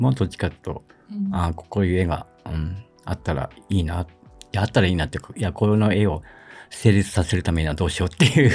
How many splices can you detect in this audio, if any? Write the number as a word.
zero